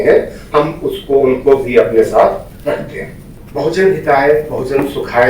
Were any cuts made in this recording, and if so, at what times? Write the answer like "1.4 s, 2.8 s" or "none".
3.4 s